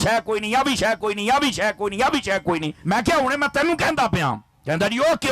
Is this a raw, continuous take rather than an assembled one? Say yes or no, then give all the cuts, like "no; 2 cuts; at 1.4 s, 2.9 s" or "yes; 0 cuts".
no; 1 cut; at 2.7 s